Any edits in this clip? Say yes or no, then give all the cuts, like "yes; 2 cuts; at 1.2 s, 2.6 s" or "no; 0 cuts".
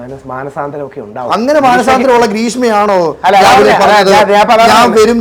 no; 0 cuts